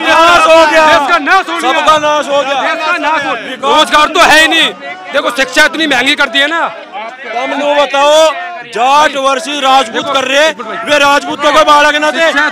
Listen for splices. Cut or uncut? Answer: uncut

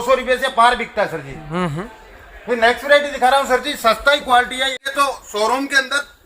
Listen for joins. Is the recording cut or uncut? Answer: cut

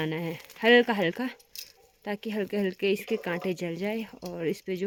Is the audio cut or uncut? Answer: uncut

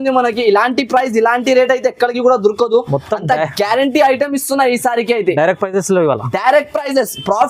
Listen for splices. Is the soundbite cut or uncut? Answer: uncut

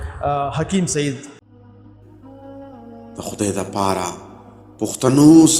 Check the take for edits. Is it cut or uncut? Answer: cut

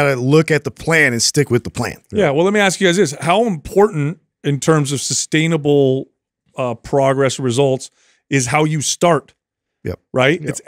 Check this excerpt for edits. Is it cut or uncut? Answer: uncut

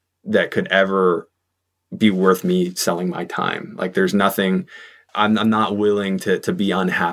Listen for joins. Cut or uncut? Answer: uncut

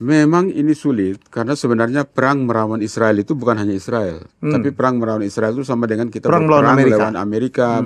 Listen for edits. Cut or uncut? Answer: uncut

